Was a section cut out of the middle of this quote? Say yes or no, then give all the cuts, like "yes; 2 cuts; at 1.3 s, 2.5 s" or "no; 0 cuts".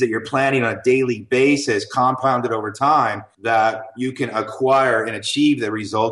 yes; 1 cut; at 3.3 s